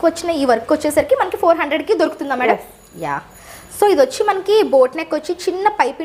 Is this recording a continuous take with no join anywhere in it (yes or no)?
yes